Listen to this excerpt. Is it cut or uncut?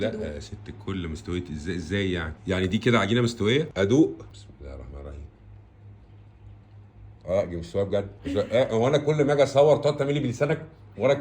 cut